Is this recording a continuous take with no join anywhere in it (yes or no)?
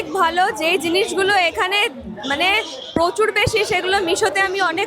yes